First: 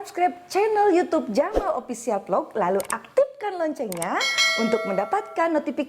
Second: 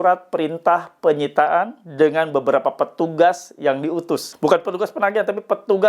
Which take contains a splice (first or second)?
second